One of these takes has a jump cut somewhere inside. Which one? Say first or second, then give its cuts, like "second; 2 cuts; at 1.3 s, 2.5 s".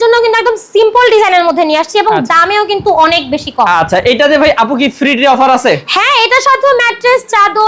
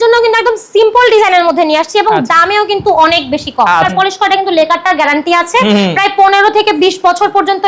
second; 1 cut; at 3.9 s